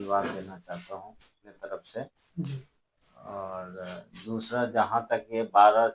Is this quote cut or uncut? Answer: cut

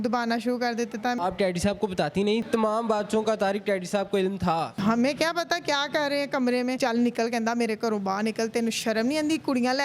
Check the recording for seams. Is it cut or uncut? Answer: cut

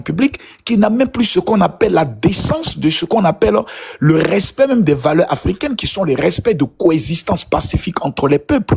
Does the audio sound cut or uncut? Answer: uncut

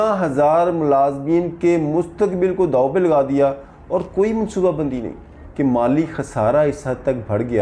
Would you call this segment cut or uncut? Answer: cut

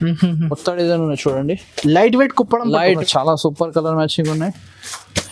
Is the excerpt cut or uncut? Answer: cut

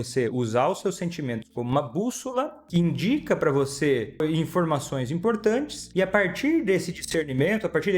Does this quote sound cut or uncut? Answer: cut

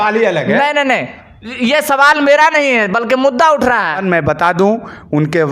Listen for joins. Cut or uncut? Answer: cut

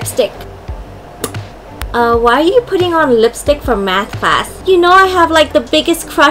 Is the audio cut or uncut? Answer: cut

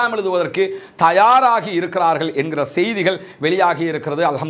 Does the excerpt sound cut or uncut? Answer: uncut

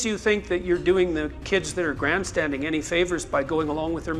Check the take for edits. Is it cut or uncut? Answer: uncut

